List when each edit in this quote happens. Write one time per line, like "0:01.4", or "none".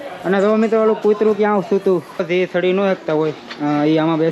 0:02.1